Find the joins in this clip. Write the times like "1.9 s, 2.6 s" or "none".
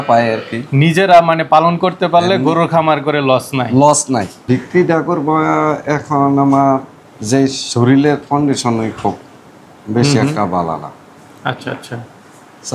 4.3 s